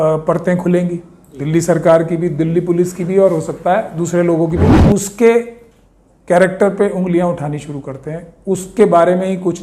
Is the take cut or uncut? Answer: cut